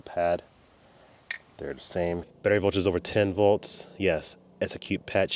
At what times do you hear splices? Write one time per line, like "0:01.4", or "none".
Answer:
0:02.3